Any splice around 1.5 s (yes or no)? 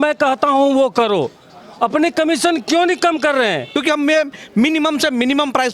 no